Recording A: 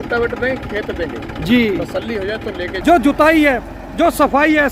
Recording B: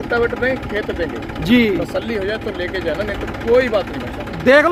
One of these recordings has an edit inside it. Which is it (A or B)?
A